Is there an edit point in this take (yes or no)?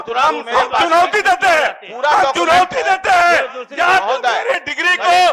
no